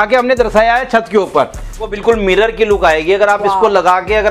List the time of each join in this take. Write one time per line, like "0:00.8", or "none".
0:01.9